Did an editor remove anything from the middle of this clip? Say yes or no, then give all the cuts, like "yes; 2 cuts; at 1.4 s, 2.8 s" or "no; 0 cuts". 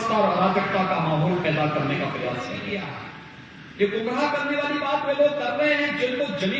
yes; 1 cut; at 2.7 s